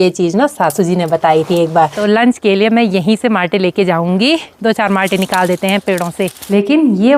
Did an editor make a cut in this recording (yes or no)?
yes